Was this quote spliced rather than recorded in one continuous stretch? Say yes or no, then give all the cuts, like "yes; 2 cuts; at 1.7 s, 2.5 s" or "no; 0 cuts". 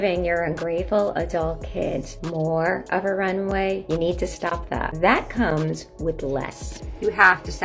no; 0 cuts